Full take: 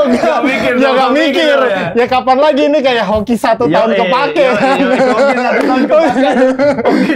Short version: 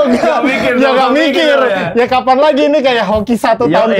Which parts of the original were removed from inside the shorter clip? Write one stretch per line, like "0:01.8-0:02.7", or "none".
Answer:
none